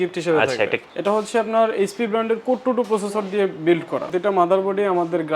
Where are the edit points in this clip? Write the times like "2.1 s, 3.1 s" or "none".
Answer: 0.9 s, 4.1 s